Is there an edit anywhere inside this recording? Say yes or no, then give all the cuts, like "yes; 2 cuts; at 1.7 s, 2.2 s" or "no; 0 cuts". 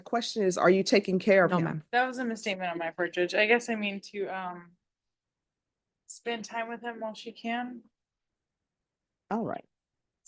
no; 0 cuts